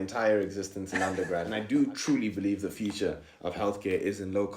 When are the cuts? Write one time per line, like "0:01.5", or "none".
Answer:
0:01.5